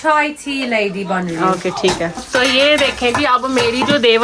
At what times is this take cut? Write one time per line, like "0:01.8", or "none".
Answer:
0:02.2